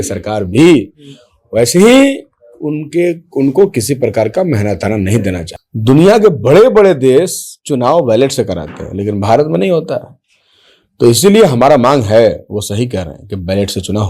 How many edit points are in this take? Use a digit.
1